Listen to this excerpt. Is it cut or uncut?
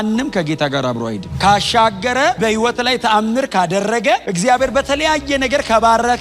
cut